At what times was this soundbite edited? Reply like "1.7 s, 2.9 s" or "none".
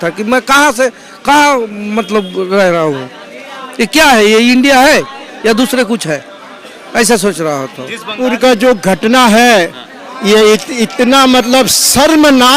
8.2 s